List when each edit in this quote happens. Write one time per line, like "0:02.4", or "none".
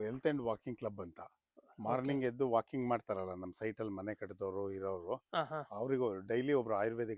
none